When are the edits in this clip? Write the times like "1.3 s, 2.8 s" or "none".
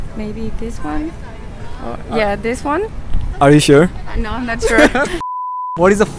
5.3 s